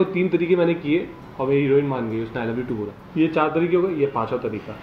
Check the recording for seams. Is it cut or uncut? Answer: cut